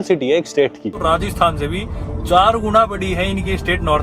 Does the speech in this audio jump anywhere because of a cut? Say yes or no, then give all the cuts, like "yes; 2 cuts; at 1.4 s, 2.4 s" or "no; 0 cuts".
yes; 1 cut; at 1.0 s